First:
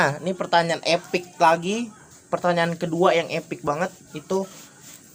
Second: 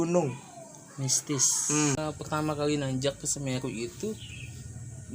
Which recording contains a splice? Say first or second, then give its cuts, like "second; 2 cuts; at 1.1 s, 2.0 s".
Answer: second; 1 cut; at 2.0 s